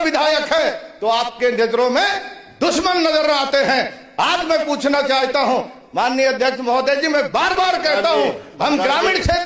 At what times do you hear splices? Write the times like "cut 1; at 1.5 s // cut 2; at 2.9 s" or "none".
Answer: none